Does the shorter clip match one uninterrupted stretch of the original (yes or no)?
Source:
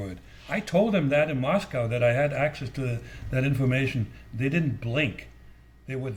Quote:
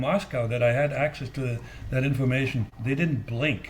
no